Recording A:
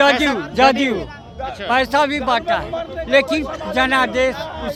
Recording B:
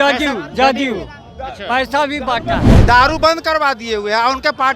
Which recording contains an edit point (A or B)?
B